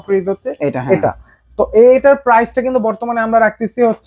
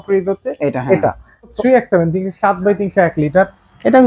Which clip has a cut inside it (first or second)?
second